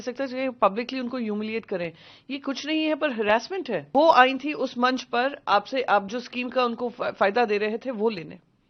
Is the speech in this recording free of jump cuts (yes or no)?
no